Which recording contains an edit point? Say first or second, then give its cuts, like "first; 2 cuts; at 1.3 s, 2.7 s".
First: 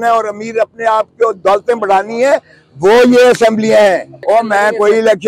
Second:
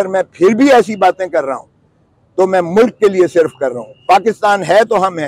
first; 1 cut; at 4.1 s